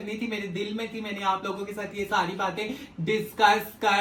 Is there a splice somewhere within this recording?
no; 0 cuts

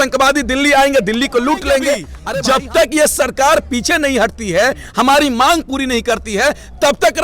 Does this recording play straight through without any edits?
no; 1 cut; at 2.2 s

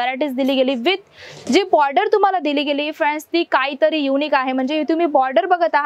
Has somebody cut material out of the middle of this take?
no; 0 cuts

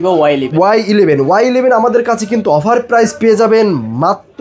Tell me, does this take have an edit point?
no; 0 cuts

